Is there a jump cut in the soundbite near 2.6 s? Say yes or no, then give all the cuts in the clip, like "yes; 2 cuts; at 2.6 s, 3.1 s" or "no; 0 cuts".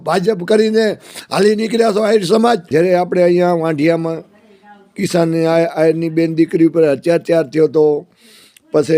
yes; 1 cut; at 2.6 s